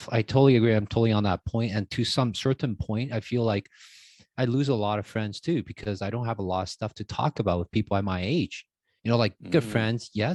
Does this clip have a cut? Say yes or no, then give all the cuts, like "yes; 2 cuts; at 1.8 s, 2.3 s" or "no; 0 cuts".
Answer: no; 0 cuts